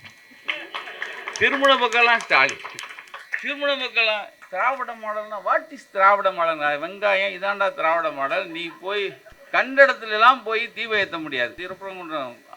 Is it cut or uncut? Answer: cut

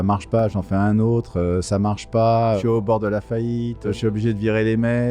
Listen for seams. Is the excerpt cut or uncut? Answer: cut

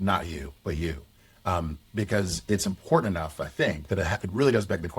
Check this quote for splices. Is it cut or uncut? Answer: uncut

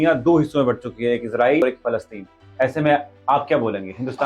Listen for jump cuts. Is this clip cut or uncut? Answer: cut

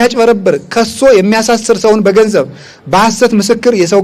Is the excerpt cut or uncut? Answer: uncut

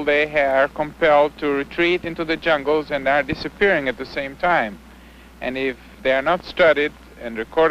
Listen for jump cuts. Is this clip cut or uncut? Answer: uncut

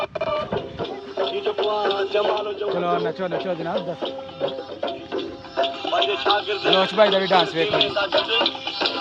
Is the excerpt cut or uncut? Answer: uncut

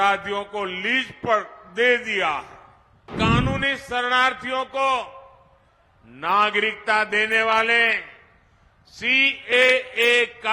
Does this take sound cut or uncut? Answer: cut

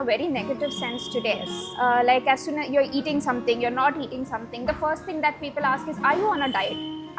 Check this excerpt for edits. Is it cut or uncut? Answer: uncut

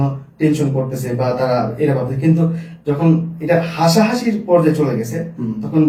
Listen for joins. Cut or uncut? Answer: uncut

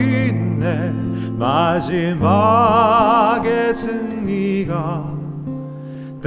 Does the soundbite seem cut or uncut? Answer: uncut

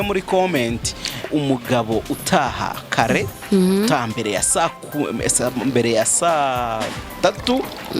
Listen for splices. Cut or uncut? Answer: cut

